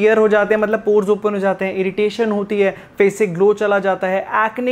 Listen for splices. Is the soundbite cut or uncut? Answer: uncut